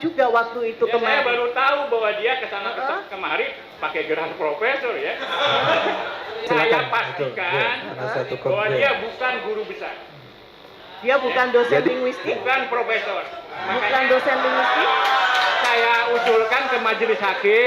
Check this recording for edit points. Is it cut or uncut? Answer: cut